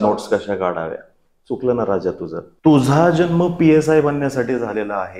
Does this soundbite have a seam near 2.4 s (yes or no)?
yes